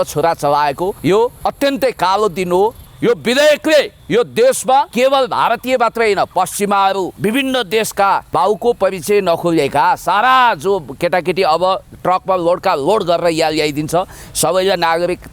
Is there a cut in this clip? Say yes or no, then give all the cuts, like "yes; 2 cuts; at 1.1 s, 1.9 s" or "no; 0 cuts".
yes; 6 cuts; at 1.1 s, 2.9 s, 4.0 s, 4.9 s, 7.1 s, 8.3 s